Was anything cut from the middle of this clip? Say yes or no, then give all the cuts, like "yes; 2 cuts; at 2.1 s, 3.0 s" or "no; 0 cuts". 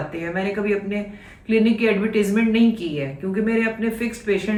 no; 0 cuts